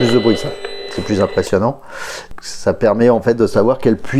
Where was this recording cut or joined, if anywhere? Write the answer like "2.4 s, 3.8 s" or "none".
2.3 s